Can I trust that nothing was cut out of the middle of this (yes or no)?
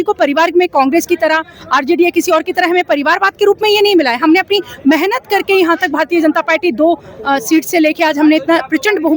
yes